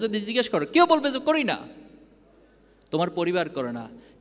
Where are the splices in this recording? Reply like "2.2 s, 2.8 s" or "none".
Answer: none